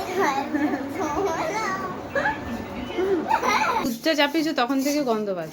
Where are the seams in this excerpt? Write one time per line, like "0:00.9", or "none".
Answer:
0:03.9